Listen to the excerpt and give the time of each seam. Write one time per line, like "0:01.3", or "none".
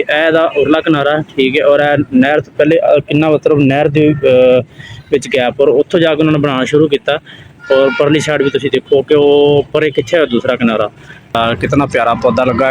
0:11.3